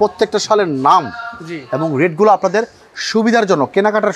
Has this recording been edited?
no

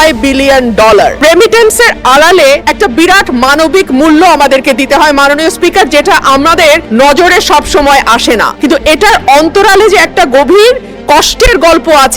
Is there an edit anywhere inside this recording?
yes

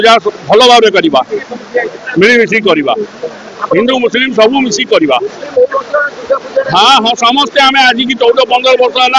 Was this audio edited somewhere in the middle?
no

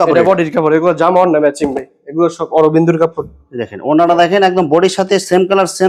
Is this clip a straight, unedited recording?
yes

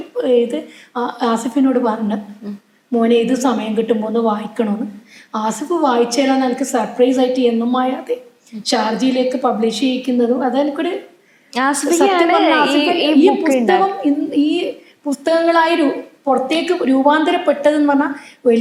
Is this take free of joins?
yes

